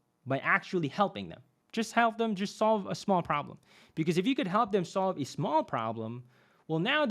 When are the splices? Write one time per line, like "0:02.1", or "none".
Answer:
0:01.6